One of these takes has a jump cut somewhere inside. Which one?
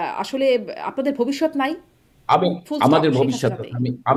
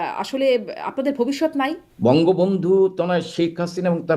second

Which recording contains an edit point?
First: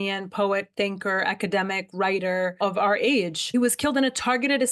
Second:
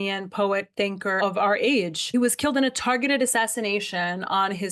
second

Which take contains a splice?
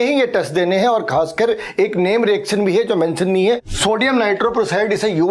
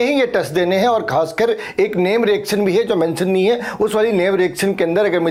first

